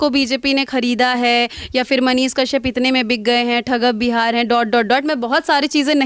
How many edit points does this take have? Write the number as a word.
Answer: zero